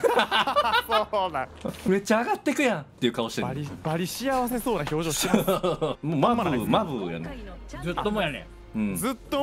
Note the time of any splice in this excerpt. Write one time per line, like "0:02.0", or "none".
0:01.8
0:06.0